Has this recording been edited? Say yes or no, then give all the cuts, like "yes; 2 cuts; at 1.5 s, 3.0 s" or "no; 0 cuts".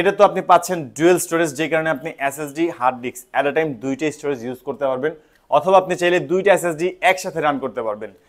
no; 0 cuts